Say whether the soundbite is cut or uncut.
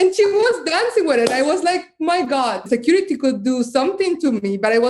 cut